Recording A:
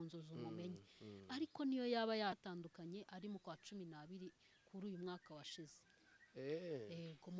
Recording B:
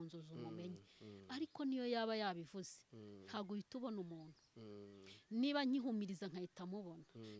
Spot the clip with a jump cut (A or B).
A